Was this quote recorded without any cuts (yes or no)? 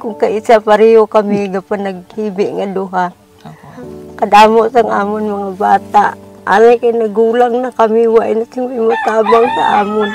yes